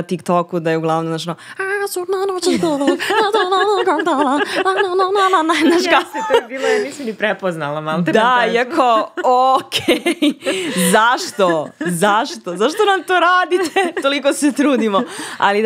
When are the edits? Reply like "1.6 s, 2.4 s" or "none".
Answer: none